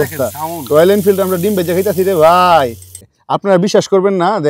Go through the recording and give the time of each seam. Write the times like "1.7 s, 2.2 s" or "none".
3.1 s